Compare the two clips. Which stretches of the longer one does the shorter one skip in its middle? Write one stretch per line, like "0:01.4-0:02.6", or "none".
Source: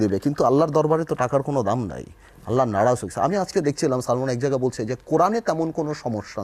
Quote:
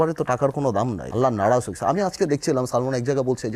0:01.9-0:02.4